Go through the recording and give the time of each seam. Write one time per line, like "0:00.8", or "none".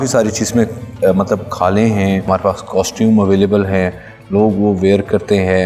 0:02.2